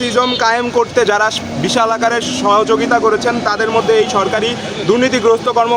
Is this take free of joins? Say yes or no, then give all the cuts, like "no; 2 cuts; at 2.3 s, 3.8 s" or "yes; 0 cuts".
yes; 0 cuts